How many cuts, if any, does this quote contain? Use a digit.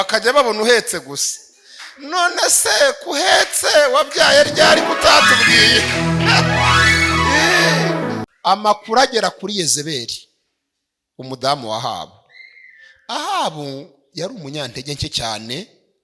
1